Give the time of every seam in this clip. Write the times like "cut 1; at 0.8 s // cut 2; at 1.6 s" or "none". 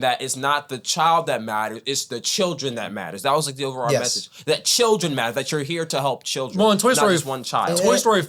none